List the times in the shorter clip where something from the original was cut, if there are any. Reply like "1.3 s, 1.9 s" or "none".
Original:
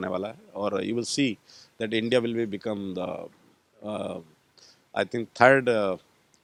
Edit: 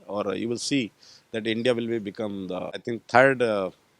2.8 s

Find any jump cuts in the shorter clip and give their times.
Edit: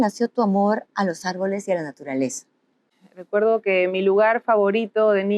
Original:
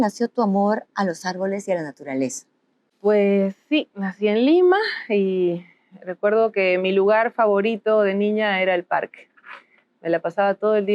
2.8 s

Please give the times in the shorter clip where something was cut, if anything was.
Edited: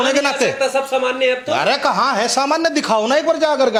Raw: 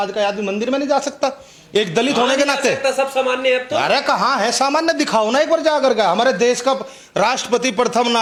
none

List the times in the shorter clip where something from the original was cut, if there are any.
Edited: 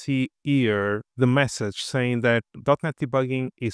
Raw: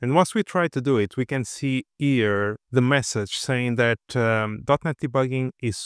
2.5 s

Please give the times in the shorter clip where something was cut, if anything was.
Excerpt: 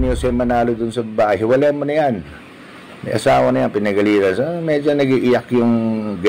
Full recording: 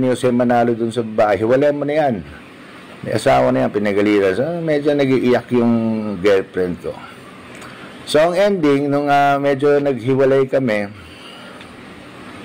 none

